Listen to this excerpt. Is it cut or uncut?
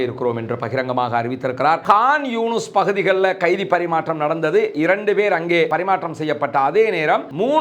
cut